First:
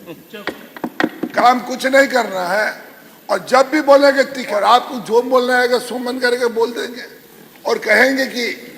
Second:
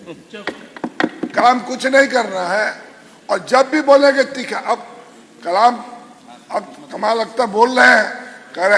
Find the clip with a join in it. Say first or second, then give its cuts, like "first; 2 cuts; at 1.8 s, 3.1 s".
first; 1 cut; at 4.5 s